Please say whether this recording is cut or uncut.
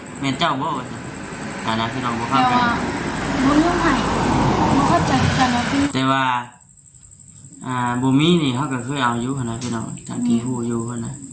cut